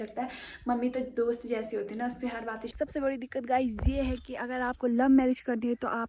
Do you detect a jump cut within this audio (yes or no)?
yes